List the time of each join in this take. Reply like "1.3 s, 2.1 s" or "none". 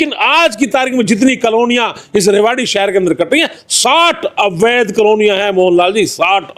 none